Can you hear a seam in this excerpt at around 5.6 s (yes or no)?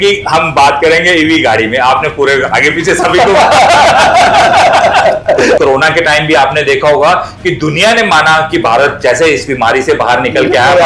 yes